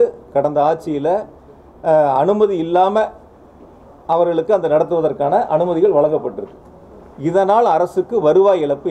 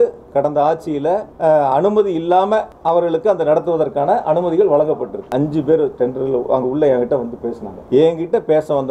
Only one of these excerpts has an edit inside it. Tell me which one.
second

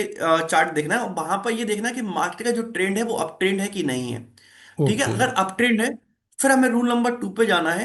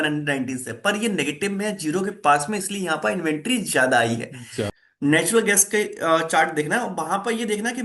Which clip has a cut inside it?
second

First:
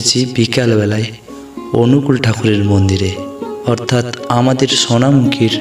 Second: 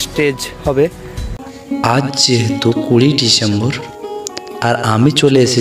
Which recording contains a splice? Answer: second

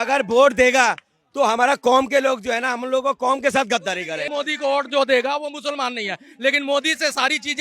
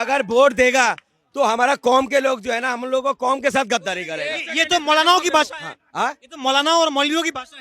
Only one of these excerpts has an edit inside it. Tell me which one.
first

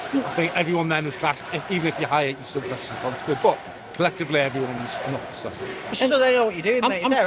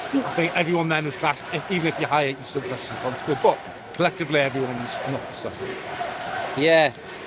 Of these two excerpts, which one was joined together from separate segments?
first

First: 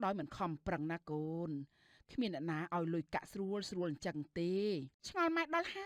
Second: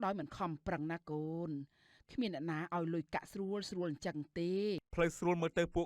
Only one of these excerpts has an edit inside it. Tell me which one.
second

